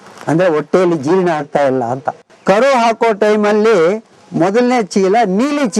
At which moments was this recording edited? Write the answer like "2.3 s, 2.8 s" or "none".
2.3 s

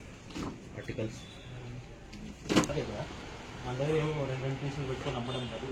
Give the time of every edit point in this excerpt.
2.7 s

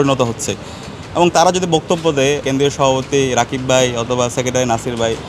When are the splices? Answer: 2.4 s

